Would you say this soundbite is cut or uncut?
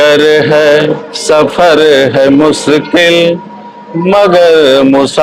uncut